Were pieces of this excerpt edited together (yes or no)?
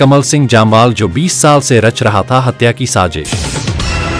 yes